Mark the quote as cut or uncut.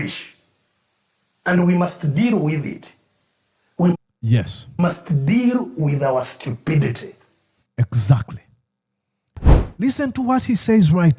cut